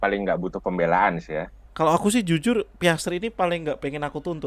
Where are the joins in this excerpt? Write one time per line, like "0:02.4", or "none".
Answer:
0:01.6